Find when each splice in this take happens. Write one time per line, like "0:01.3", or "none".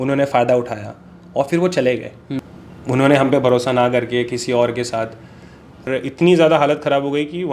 0:02.2
0:05.9